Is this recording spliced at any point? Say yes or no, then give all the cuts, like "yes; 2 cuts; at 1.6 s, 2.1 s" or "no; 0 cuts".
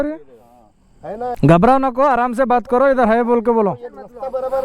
yes; 1 cut; at 1.3 s